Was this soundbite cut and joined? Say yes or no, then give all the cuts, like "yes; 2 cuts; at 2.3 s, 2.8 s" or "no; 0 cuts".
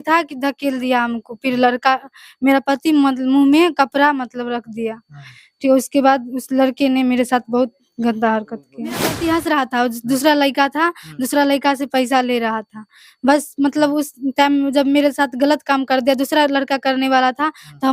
yes; 1 cut; at 9.0 s